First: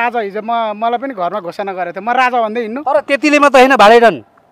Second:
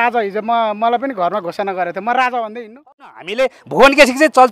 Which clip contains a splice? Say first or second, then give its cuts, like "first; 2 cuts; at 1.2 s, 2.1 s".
second; 1 cut; at 3.1 s